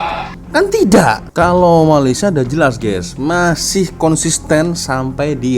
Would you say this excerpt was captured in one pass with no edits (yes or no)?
no